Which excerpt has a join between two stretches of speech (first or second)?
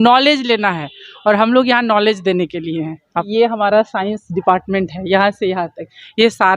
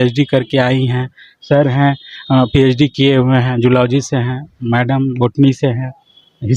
first